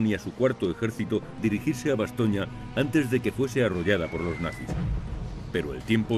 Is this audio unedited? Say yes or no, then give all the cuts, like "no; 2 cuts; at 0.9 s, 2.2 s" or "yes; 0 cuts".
yes; 0 cuts